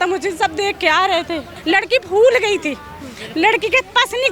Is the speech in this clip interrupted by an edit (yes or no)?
yes